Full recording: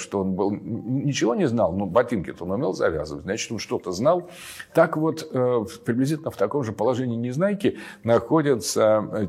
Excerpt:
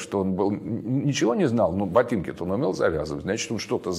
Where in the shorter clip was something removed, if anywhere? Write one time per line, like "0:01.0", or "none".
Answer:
none